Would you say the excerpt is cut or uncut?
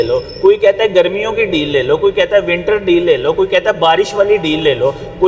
uncut